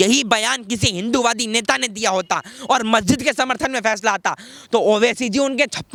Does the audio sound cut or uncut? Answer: uncut